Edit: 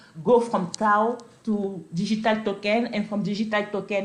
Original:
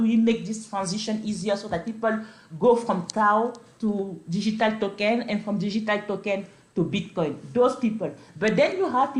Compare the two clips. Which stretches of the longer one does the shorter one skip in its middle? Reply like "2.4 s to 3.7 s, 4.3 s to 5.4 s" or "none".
none